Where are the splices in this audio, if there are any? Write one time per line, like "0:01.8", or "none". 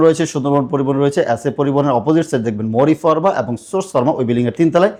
none